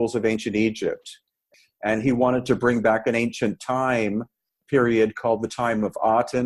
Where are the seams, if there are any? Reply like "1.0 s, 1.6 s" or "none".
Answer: 1.5 s, 4.6 s